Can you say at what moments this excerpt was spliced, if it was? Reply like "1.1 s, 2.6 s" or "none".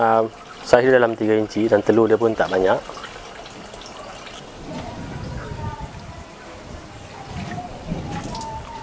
4.4 s